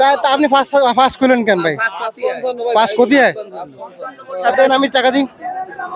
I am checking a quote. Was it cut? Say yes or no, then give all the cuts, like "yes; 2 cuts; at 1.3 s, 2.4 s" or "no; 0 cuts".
yes; 1 cut; at 4.4 s